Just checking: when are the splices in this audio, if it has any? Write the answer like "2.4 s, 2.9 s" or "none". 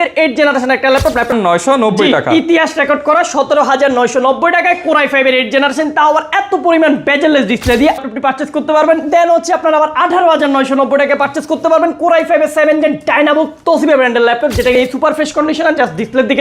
1.3 s, 8.0 s, 14.7 s